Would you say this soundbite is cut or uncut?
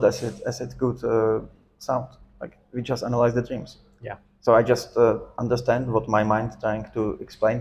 uncut